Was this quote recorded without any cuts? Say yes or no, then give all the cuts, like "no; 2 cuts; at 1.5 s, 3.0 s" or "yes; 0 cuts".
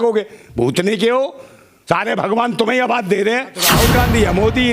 no; 1 cut; at 3.6 s